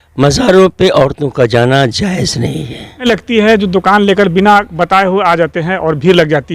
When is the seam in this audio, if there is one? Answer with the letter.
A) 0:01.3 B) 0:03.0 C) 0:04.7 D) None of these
B